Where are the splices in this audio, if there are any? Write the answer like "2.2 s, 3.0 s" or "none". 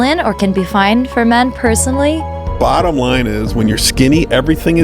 2.4 s